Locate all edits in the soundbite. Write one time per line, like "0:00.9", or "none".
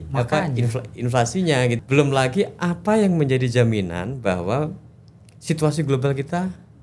0:01.8